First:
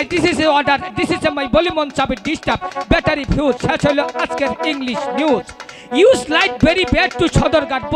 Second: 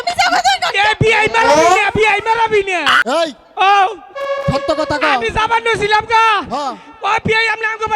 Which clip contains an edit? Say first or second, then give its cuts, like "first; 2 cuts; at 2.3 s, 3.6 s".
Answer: second; 1 cut; at 3.0 s